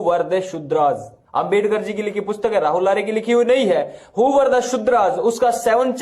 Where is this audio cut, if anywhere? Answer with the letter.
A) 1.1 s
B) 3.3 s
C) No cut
A